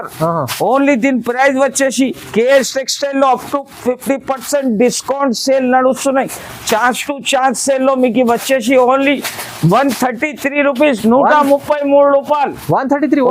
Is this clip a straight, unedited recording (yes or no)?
yes